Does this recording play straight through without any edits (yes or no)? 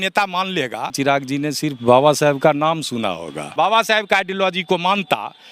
no